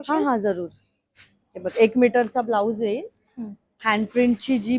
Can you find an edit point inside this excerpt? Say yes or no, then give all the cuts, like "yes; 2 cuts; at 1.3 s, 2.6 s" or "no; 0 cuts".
no; 0 cuts